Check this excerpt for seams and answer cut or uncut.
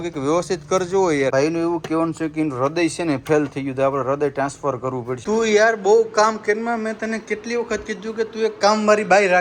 cut